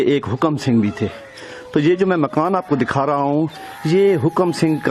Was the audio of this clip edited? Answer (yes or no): no